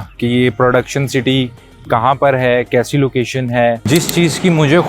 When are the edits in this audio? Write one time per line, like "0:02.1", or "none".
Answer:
0:03.8

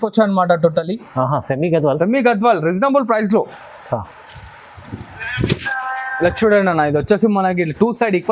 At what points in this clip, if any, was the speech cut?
none

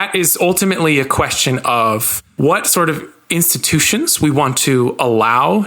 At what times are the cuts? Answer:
0:02.2

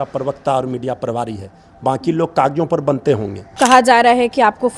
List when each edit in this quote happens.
0:03.5

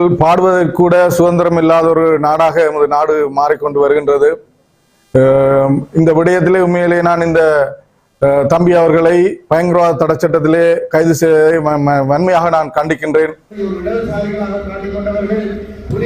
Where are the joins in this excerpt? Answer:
0:13.6

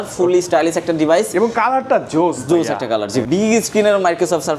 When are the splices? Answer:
0:03.2

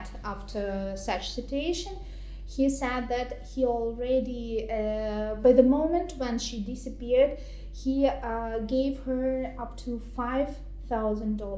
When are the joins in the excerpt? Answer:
none

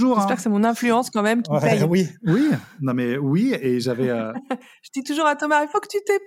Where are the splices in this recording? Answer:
none

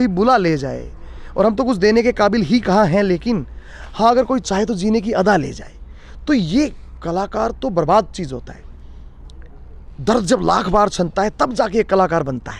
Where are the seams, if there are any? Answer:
none

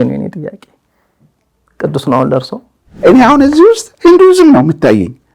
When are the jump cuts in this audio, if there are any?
0:02.9

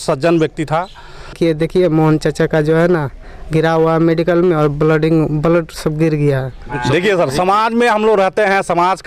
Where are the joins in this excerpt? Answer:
0:01.4
0:06.7

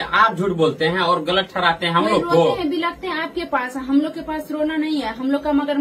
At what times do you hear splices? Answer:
none

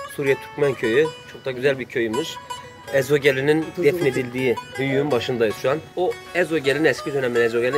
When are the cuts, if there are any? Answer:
0:03.7
0:05.9

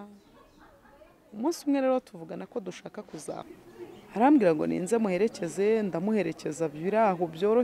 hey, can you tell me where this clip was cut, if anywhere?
0:03.5

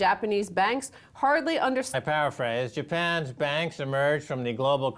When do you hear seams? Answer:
none

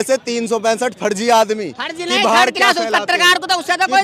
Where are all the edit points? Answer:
none

